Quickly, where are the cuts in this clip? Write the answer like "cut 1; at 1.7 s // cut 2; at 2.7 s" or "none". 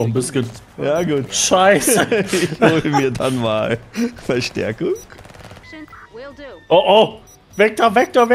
cut 1; at 5.6 s